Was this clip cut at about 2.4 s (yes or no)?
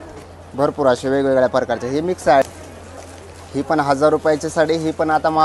yes